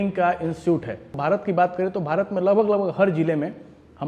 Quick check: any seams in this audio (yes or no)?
yes